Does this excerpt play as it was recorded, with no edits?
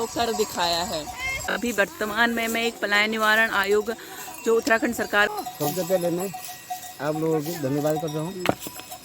no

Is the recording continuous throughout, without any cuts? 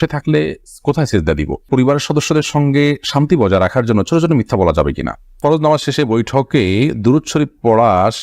no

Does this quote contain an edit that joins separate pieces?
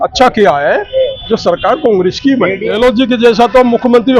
yes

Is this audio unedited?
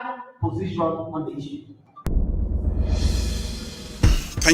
no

